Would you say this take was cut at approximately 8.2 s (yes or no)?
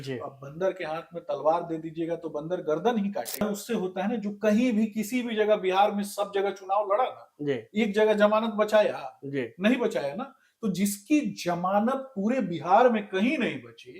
no